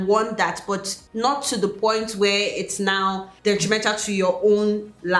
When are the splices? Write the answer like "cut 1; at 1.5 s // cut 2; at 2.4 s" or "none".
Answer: cut 1; at 1.0 s // cut 2; at 3.3 s